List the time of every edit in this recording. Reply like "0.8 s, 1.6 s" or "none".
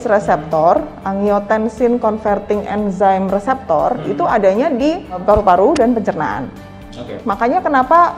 5.2 s, 7.1 s